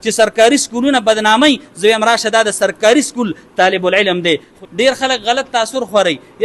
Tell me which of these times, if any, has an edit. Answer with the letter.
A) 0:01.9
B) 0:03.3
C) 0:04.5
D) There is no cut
C